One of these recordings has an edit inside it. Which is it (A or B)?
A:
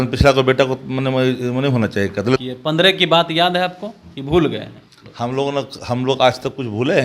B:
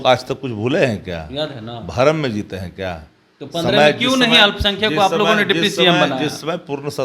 A